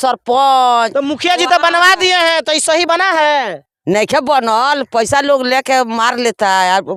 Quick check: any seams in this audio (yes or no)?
no